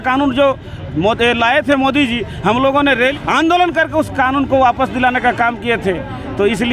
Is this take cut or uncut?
cut